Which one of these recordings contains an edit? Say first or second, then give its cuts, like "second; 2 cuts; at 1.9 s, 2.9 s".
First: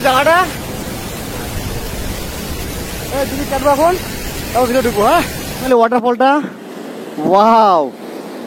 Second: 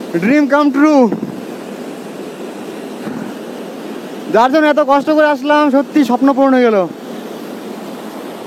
first; 1 cut; at 5.6 s